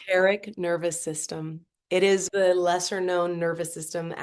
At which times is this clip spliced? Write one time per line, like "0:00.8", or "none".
0:02.3